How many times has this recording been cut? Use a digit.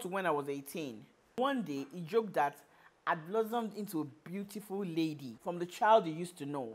1